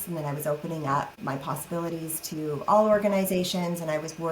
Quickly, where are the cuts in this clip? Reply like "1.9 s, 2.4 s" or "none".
1.2 s

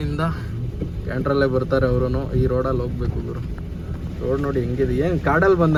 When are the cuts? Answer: none

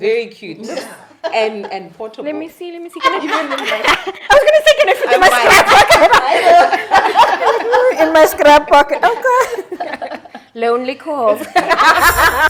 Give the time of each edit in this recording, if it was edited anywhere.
none

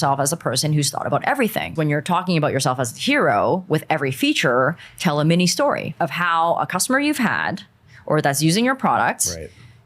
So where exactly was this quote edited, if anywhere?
1.7 s, 6.0 s

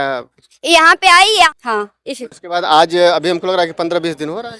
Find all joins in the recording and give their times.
1.5 s

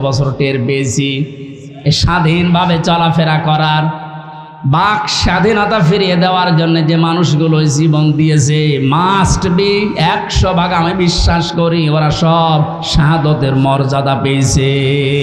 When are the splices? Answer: none

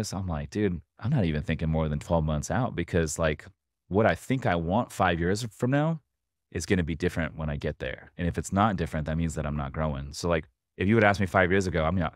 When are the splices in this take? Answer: 0.9 s

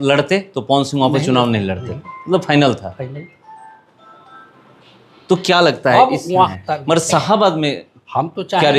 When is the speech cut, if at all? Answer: 6.5 s

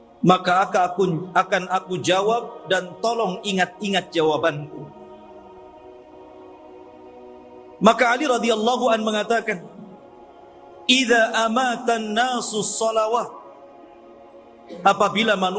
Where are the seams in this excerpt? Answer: none

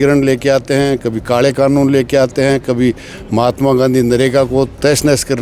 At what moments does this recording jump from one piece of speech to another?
none

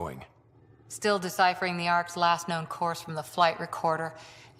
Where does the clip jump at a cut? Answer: none

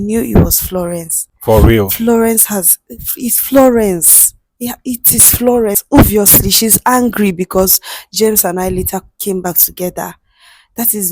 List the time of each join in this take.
5.8 s

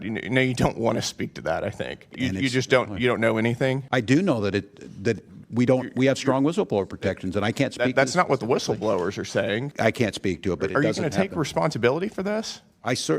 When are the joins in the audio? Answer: 2.1 s, 3.8 s, 9.7 s

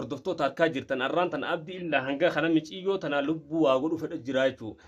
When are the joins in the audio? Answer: none

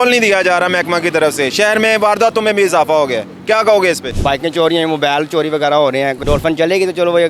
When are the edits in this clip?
4.1 s, 6.2 s

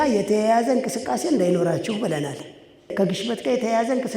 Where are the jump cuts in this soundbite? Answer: 2.9 s

